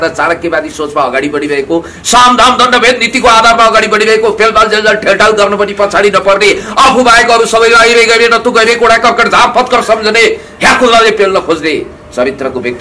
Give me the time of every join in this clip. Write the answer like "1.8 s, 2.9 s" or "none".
none